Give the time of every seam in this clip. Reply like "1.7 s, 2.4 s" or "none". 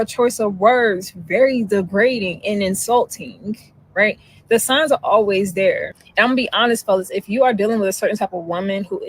8.1 s